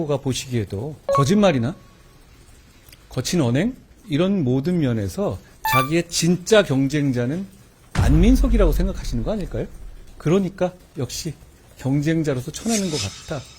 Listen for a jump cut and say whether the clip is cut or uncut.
cut